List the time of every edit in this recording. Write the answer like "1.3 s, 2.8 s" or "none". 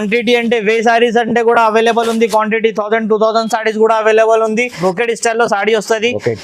4.8 s